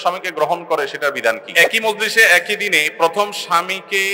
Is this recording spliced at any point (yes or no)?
yes